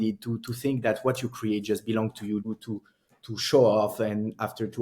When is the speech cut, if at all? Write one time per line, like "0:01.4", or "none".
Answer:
0:02.4